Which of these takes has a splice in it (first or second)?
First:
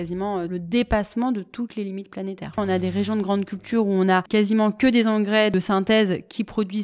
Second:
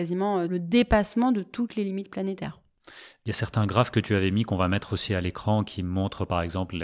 first